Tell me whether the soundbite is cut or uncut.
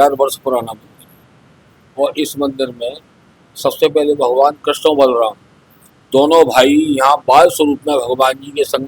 uncut